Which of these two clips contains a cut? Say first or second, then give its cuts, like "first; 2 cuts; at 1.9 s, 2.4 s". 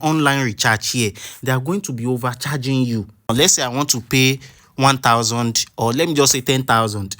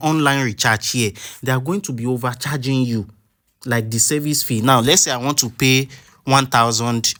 first; 1 cut; at 3.3 s